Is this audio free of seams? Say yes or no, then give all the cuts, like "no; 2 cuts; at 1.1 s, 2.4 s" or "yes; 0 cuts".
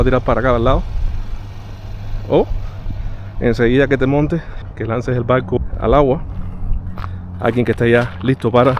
no; 2 cuts; at 4.6 s, 5.6 s